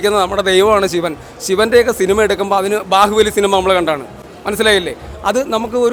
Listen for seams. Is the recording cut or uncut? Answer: uncut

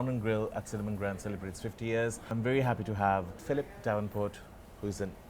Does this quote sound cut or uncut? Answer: cut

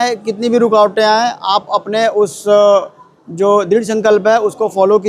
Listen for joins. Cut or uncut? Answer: uncut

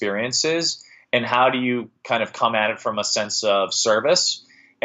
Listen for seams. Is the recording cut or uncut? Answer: uncut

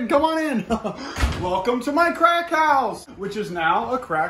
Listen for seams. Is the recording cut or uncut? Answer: uncut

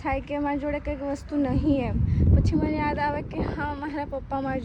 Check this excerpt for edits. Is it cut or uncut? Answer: uncut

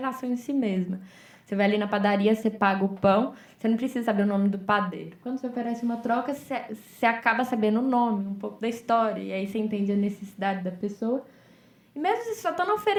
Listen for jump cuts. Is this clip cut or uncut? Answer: uncut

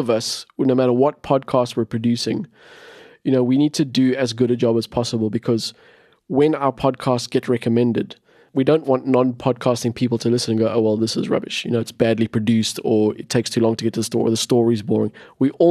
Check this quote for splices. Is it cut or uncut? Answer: cut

